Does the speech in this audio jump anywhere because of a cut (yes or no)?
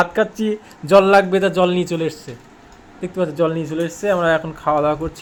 no